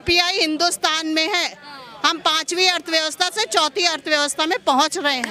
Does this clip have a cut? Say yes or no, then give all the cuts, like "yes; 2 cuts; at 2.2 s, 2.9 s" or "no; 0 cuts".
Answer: no; 0 cuts